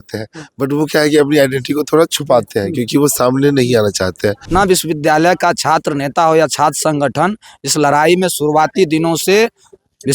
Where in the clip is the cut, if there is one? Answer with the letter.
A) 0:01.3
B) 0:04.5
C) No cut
B